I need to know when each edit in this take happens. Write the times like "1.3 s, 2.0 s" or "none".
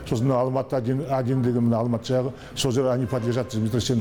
none